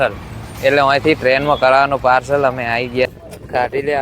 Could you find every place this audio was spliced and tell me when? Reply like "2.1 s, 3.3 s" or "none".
3.1 s